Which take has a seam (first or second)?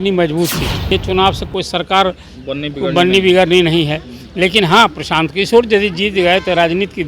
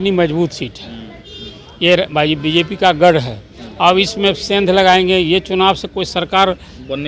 first